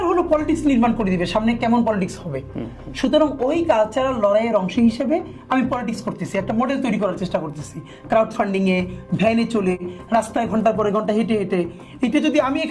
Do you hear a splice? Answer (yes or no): no